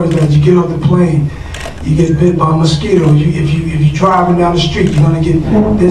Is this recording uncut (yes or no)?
yes